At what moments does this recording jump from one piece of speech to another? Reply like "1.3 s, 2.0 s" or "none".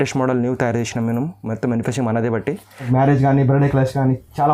2.9 s